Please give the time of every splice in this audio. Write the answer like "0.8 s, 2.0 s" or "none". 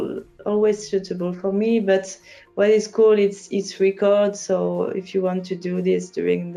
none